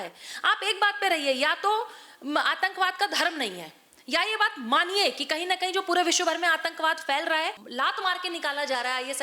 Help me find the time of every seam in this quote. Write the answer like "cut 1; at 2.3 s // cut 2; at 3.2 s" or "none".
cut 1; at 7.6 s